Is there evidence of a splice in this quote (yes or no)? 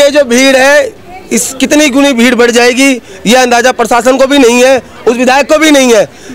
no